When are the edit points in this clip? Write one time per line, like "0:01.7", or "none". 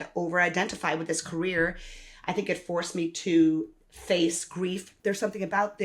0:04.9